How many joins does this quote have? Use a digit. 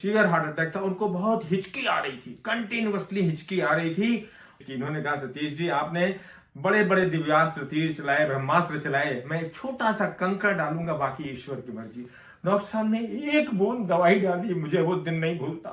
1